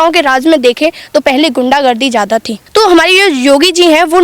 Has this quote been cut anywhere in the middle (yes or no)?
yes